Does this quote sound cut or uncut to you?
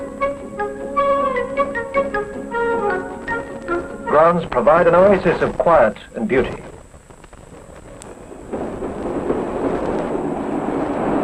uncut